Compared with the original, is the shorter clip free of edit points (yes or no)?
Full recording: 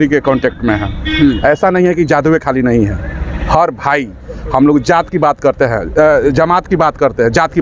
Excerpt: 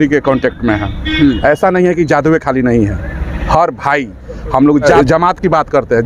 no